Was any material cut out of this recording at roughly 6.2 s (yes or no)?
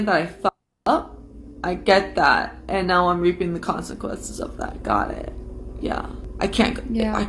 yes